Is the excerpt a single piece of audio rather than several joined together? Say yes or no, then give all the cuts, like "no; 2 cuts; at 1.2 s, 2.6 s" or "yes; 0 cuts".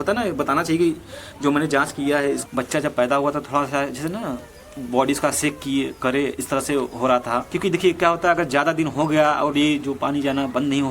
no; 2 cuts; at 2.4 s, 7.5 s